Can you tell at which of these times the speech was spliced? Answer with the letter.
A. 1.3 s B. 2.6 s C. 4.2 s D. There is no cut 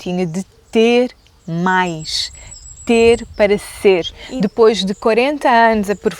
C